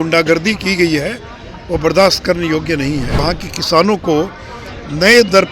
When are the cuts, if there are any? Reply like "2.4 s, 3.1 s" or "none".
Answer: 3.2 s